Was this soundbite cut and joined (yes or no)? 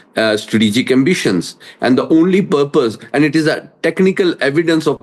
no